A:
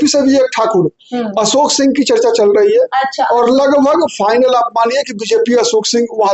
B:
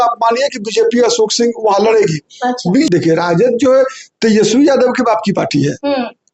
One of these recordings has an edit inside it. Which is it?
B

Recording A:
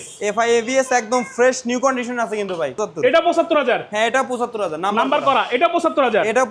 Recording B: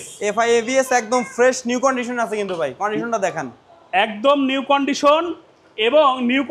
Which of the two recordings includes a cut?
A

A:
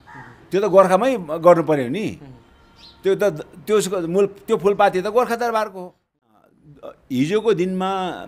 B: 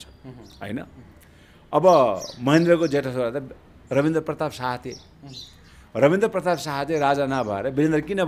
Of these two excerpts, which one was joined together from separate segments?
A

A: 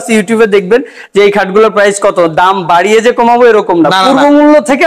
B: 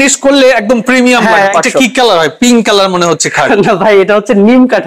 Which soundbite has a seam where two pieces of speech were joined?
B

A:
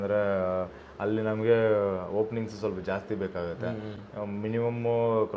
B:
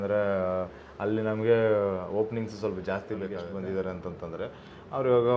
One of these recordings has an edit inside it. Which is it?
B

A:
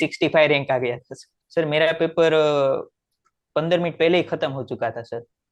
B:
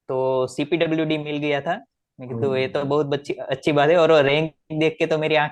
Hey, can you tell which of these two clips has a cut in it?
A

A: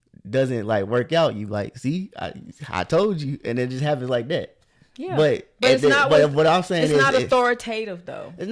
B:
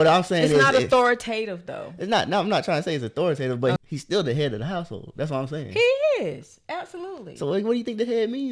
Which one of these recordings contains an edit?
B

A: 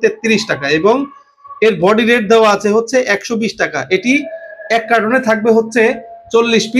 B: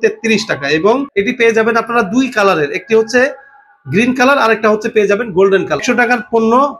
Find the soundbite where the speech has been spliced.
B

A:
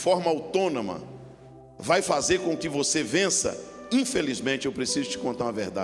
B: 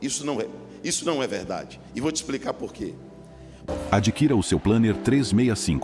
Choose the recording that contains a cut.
B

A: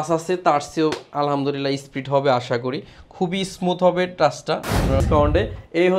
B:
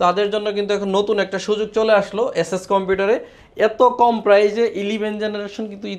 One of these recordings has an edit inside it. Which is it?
A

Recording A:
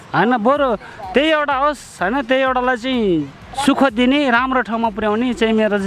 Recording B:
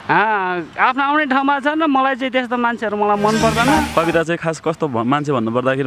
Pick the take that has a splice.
B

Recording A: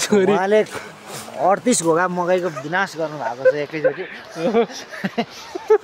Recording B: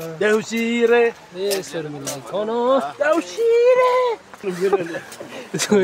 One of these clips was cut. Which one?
B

